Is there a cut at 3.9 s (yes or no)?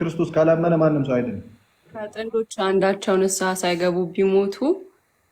no